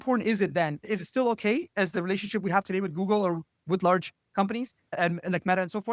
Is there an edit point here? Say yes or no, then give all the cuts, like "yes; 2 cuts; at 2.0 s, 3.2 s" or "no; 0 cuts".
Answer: no; 0 cuts